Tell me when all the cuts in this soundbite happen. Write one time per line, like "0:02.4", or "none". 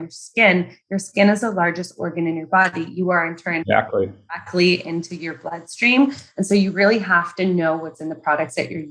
none